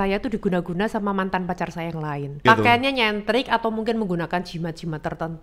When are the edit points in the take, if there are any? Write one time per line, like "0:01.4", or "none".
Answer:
0:02.4

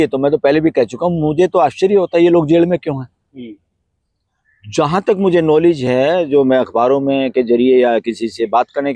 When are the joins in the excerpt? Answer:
none

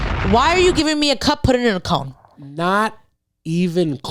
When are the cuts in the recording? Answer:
none

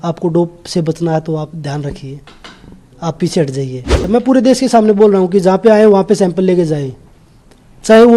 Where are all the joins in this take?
0:04.0

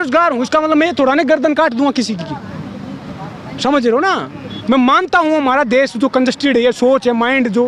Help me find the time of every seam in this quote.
none

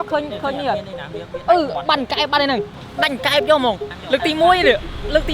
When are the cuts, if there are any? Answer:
0:02.7
0:03.9

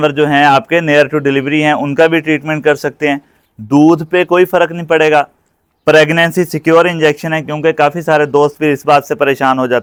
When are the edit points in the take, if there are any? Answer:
none

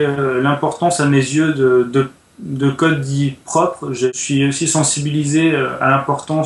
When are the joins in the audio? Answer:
0:04.1

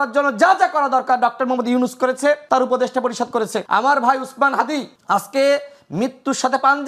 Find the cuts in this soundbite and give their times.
0:02.4
0:03.6
0:04.9

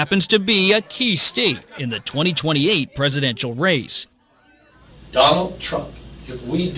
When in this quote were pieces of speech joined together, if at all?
none

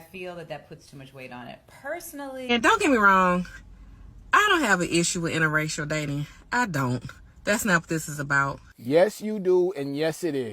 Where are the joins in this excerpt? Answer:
0:02.5

